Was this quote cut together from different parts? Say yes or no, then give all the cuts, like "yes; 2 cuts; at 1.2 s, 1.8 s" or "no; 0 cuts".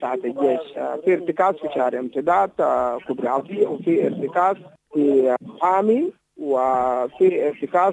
yes; 2 cuts; at 4.7 s, 5.4 s